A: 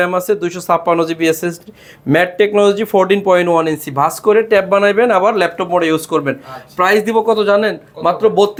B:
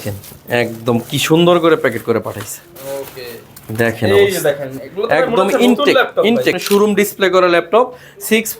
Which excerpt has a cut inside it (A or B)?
B